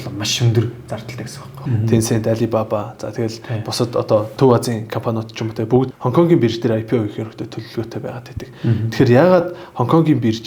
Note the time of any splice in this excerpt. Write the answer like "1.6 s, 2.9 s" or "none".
1.6 s, 4.3 s, 5.9 s